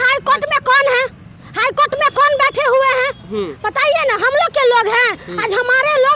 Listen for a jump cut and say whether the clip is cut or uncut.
uncut